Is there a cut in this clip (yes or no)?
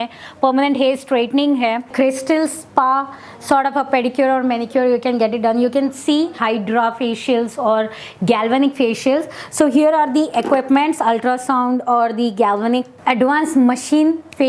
yes